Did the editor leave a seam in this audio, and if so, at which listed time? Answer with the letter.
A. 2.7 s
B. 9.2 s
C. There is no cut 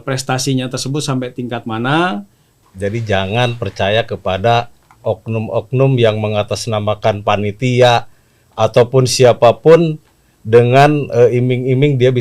A